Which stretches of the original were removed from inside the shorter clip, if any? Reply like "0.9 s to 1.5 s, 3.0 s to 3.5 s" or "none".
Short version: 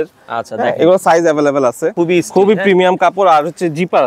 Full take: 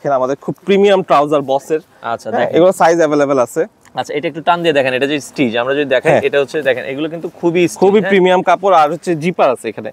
3.7 s to 7.4 s